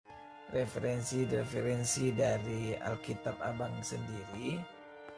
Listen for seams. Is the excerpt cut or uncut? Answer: uncut